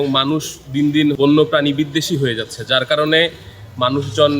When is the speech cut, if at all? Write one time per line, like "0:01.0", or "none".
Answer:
0:01.2